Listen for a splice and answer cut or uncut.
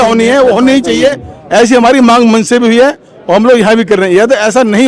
uncut